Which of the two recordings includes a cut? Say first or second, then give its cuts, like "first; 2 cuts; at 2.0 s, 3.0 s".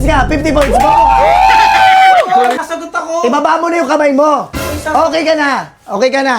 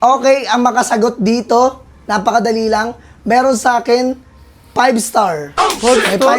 first; 1 cut; at 2.7 s